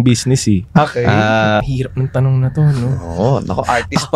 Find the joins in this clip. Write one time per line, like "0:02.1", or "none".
0:01.6